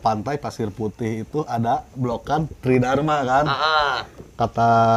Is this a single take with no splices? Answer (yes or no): yes